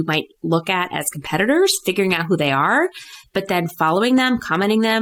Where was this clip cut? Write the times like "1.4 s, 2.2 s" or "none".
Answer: none